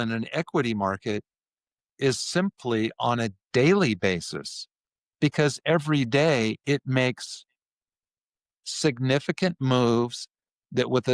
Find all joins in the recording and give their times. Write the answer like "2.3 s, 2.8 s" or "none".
none